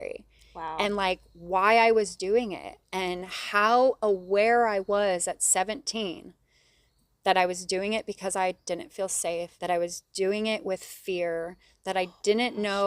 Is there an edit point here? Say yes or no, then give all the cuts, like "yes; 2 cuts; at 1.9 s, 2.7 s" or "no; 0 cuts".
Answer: yes; 1 cut; at 9.5 s